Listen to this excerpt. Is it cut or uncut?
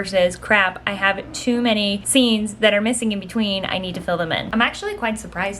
cut